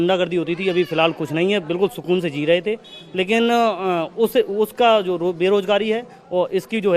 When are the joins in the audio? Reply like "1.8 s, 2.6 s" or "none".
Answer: none